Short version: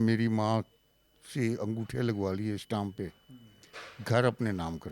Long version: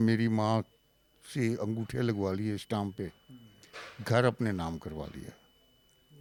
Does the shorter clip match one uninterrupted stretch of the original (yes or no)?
yes